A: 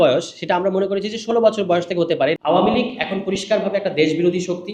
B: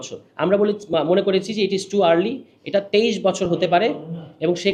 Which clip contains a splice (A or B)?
A